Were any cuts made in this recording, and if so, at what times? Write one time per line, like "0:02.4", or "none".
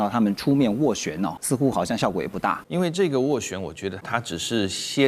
0:01.4
0:02.6
0:04.0